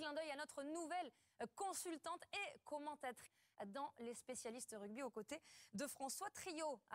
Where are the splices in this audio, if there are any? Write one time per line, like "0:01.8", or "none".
none